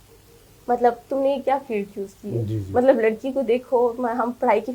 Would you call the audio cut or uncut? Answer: uncut